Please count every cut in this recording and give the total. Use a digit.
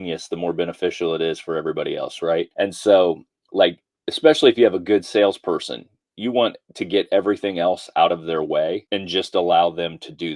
2